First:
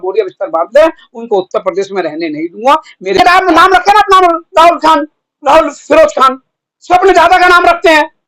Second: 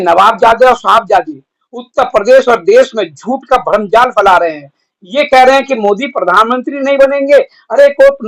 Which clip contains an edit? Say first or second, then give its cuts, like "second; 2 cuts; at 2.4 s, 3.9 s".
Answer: first; 1 cut; at 3.2 s